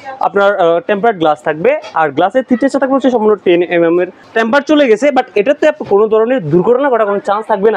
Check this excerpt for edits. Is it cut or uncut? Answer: cut